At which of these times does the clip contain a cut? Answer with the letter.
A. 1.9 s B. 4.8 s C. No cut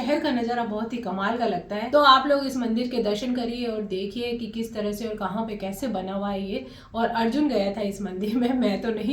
A